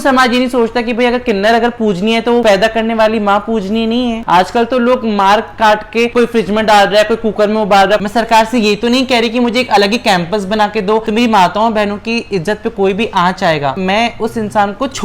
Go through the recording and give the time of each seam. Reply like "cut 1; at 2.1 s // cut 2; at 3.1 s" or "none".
cut 1; at 4.2 s // cut 2; at 8.0 s // cut 3; at 11.1 s